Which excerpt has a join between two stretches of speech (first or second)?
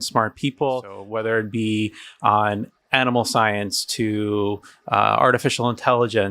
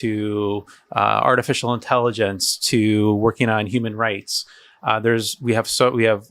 first